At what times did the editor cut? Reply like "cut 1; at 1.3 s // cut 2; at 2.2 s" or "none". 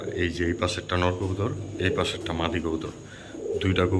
none